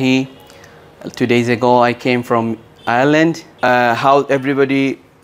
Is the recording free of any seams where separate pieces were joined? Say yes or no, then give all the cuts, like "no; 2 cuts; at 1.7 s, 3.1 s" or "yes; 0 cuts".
no; 1 cut; at 3.5 s